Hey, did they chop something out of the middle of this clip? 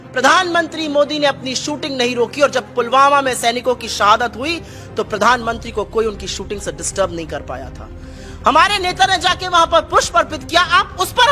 no; 0 cuts

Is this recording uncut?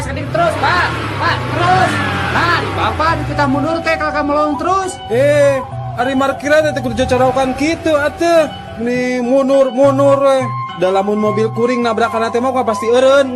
yes; 0 cuts

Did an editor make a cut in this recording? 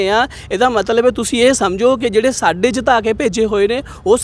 no; 0 cuts

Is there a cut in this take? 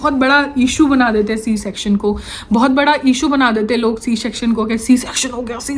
no; 0 cuts

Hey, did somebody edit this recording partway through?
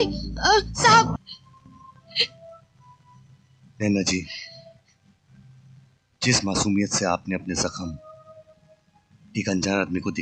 yes; 1 cut; at 1.2 s

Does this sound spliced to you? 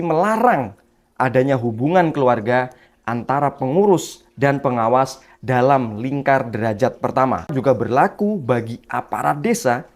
yes; 1 cut; at 7.5 s

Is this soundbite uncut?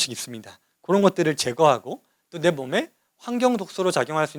yes; 0 cuts

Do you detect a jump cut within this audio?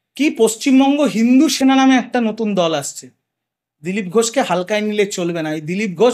no; 0 cuts

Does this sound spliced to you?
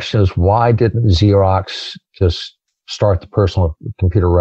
no; 0 cuts

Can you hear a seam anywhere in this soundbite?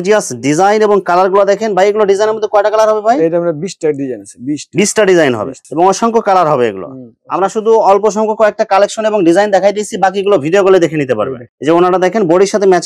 no; 0 cuts

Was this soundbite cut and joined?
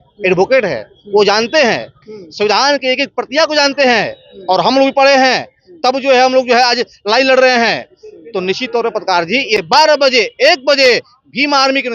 yes; 1 cut; at 9.6 s

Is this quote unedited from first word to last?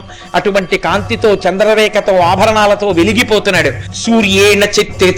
no; 1 cut; at 3.9 s

